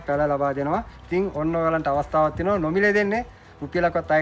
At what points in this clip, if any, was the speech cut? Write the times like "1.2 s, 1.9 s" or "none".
none